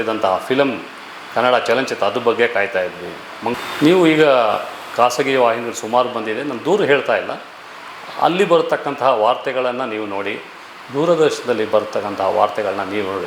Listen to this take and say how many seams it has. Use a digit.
1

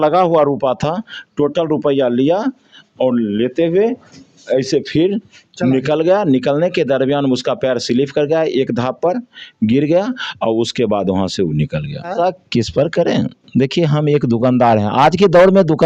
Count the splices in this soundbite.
1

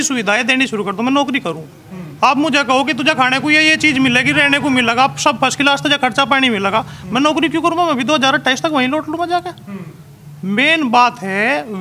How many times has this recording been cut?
0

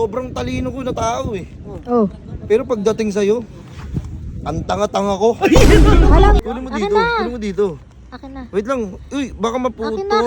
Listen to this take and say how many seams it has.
1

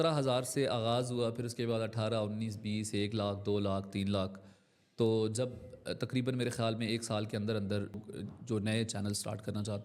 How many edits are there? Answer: 1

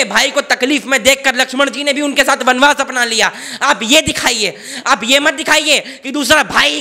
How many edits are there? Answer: 0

